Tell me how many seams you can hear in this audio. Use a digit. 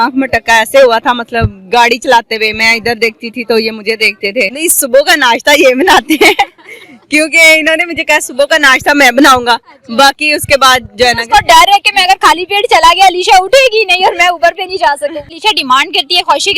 2